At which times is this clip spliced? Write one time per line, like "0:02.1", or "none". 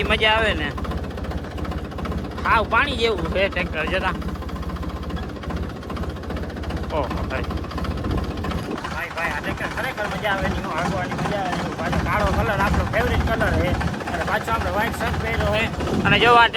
none